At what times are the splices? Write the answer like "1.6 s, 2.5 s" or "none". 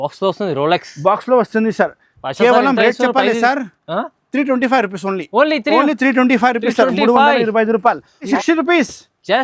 8.3 s